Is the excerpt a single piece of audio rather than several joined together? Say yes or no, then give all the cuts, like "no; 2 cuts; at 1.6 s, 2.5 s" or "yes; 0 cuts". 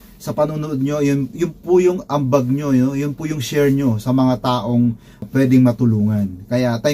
no; 1 cut; at 5.2 s